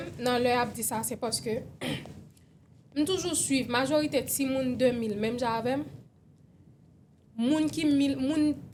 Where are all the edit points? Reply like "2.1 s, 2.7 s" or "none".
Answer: none